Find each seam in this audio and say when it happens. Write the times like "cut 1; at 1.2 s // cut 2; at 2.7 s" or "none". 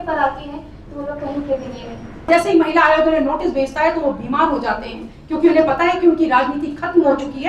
cut 1; at 2.3 s